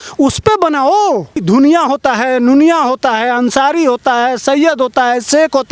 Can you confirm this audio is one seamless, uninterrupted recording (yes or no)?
no